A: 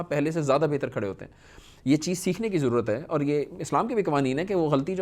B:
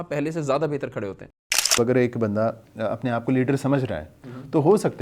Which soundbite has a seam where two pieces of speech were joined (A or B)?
B